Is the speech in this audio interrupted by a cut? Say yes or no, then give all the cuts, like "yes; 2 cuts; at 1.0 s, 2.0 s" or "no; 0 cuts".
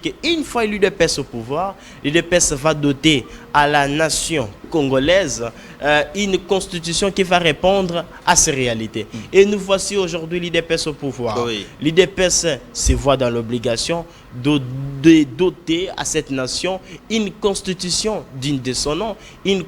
no; 0 cuts